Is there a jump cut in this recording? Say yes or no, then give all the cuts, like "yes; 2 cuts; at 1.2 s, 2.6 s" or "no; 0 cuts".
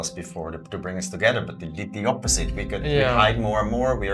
no; 0 cuts